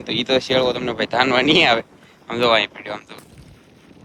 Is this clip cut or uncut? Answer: uncut